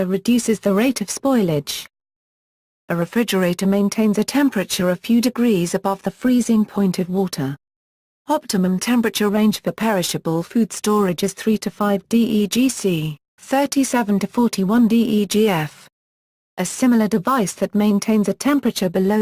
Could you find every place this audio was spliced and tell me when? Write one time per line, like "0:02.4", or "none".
none